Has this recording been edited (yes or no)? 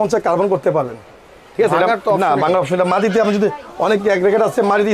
no